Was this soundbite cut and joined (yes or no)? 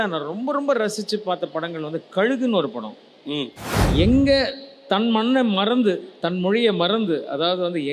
yes